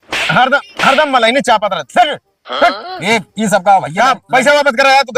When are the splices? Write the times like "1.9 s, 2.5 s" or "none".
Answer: none